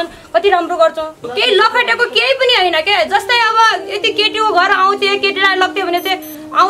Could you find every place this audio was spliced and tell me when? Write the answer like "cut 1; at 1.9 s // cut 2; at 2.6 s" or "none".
cut 1; at 1.2 s